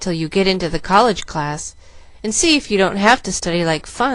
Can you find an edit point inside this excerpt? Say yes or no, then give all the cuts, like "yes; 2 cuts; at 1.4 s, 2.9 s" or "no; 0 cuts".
no; 0 cuts